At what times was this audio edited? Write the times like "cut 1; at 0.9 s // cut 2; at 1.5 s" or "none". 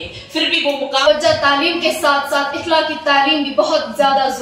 cut 1; at 1.1 s